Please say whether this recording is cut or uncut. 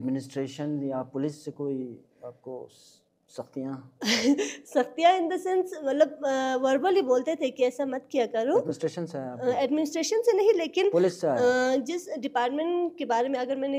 uncut